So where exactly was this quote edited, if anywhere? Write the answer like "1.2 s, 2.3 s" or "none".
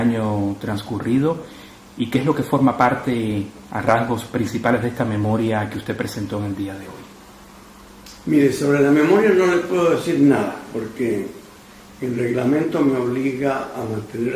11.5 s